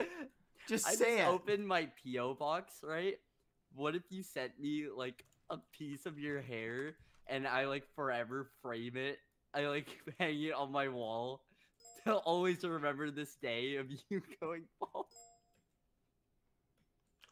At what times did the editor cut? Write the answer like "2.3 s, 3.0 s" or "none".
none